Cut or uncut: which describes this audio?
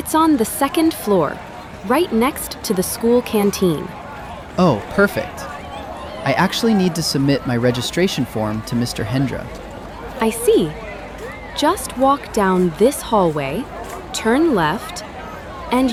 uncut